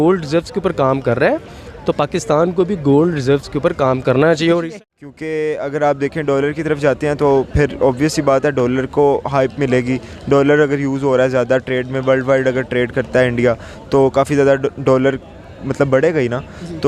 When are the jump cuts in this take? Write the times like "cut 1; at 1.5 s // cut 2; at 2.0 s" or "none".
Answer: cut 1; at 4.6 s